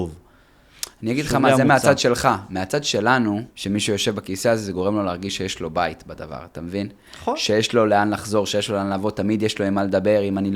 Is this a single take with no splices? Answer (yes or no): no